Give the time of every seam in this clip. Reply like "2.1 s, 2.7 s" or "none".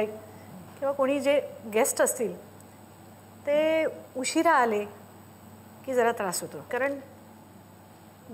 6.7 s